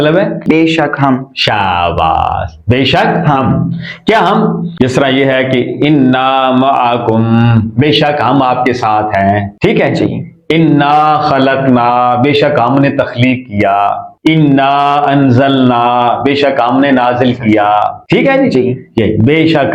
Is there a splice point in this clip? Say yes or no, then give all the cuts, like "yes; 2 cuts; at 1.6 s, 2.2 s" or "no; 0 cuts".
no; 0 cuts